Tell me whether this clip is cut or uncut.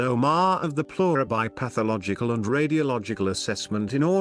uncut